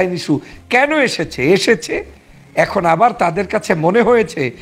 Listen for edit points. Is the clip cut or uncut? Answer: uncut